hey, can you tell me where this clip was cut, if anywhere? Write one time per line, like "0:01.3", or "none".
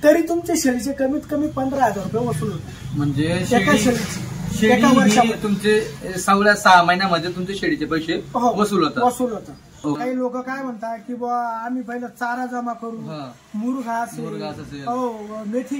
0:10.0